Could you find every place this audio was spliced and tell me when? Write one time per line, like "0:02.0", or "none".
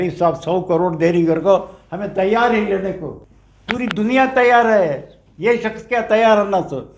0:03.0